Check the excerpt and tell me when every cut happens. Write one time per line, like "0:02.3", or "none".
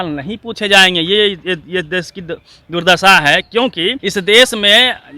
0:04.0